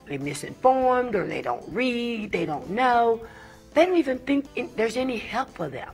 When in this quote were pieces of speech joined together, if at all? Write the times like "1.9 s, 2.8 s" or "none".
4.5 s